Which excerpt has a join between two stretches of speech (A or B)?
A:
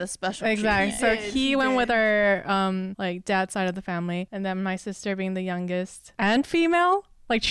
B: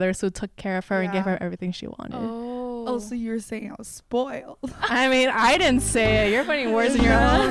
A